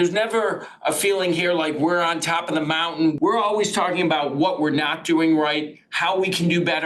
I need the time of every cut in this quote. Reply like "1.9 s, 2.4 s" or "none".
3.2 s